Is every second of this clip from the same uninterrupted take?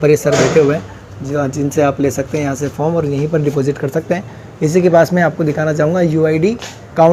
yes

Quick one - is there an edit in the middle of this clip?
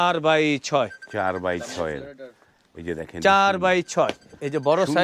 no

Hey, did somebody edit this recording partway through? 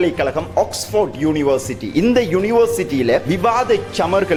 no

